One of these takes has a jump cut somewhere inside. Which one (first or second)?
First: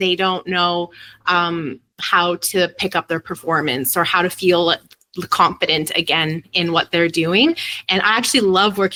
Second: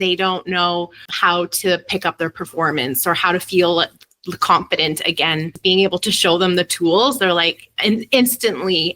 second